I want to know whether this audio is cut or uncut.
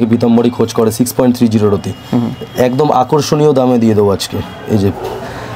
uncut